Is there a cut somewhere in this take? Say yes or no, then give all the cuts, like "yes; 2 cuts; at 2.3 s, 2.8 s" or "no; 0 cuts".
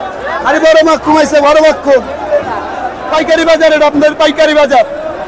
yes; 1 cut; at 3.0 s